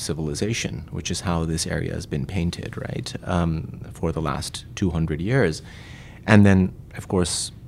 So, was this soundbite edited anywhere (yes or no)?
no